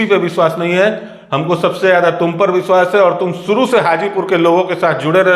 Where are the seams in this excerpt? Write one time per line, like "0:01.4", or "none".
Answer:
none